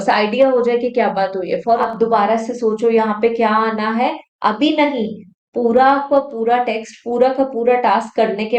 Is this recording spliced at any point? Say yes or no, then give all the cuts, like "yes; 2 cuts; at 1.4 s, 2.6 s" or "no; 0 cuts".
yes; 1 cut; at 1.8 s